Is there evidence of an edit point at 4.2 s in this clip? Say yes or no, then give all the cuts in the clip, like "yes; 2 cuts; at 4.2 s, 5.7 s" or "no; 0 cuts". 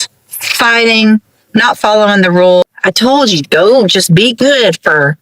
no; 1 cut; at 2.6 s